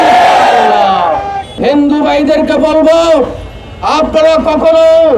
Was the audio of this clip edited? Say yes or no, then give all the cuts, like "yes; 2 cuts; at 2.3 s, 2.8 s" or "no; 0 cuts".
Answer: yes; 1 cut; at 1.5 s